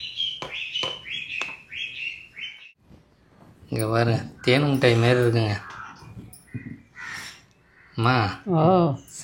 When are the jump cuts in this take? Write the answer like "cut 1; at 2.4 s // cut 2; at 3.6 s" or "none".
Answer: cut 1; at 2.7 s